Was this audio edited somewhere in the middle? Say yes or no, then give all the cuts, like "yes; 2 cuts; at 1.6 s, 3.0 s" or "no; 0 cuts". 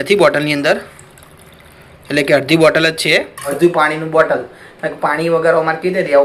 yes; 1 cut; at 3.4 s